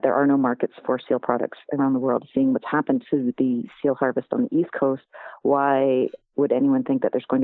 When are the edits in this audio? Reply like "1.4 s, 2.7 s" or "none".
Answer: none